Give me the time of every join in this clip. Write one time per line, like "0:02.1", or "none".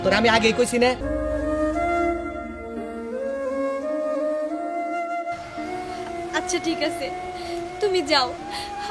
0:01.1